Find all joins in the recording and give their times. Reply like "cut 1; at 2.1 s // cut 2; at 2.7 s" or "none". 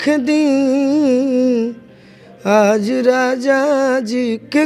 none